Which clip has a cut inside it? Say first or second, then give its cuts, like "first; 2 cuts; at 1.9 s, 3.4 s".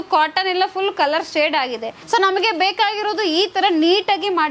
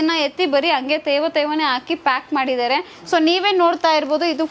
first; 1 cut; at 1.9 s